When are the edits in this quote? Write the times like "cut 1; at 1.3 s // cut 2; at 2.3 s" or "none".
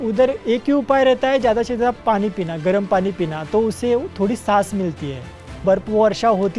cut 1; at 5.5 s